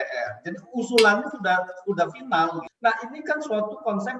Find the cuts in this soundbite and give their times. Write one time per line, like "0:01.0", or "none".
0:02.7